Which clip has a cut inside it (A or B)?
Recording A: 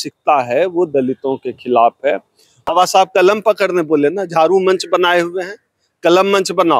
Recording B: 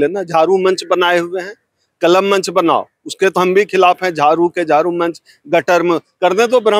A